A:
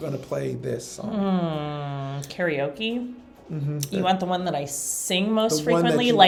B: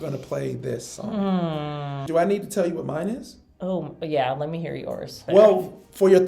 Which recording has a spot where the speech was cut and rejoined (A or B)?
B